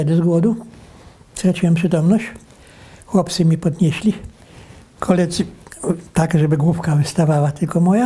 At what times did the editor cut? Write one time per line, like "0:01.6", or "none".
none